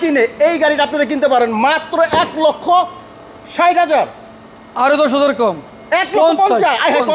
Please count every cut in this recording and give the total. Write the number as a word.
zero